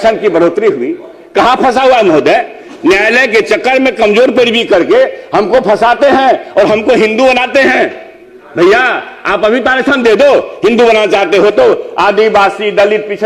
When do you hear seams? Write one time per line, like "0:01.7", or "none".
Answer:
none

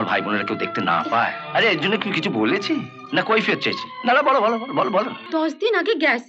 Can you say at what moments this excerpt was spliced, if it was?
0:01.4
0:05.2

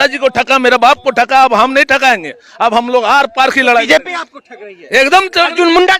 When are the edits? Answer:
none

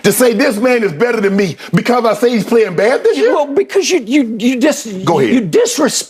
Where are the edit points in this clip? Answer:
none

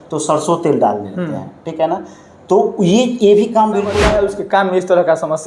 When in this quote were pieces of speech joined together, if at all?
0:04.0

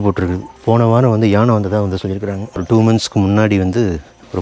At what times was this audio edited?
0:02.6

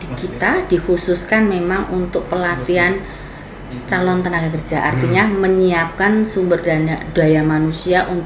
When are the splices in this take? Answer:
none

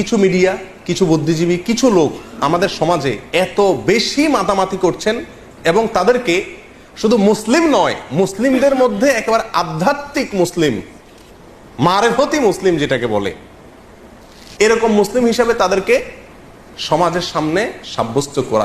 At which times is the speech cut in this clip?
none

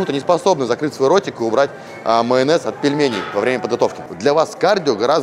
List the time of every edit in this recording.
0:04.1

